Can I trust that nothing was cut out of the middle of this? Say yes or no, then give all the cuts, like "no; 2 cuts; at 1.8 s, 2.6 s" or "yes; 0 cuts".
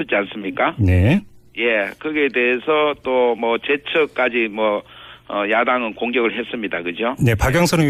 yes; 0 cuts